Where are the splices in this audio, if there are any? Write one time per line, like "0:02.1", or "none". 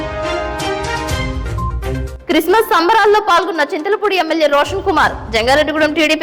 0:02.0